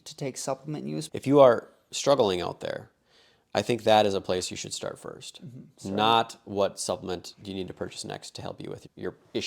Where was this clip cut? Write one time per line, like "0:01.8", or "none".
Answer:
0:01.1